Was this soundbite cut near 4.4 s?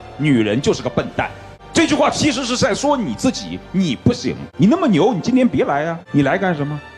yes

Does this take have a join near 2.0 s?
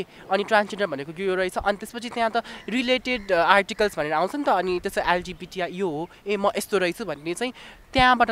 no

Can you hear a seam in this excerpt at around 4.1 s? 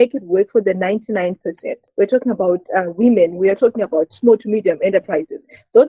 no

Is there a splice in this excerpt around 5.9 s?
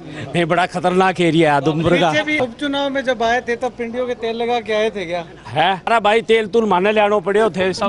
yes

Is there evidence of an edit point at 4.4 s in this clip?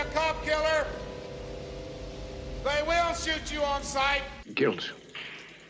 yes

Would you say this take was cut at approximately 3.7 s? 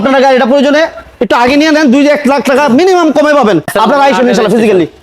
yes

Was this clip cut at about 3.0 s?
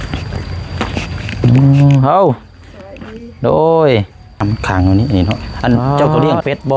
no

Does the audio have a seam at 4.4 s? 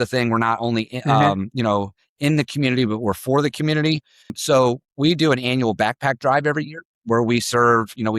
yes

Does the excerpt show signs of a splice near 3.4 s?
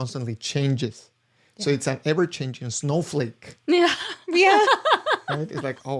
no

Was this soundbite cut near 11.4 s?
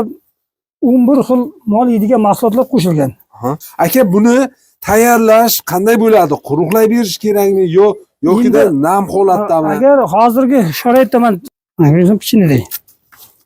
yes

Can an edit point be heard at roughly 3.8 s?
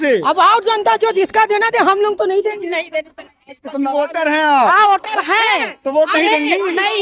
yes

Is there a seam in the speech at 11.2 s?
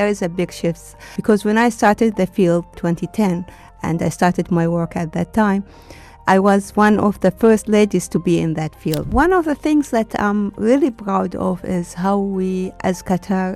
no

